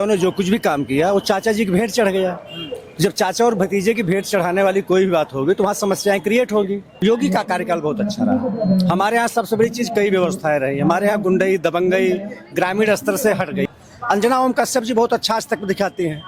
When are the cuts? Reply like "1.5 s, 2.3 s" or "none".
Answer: 6.9 s, 13.7 s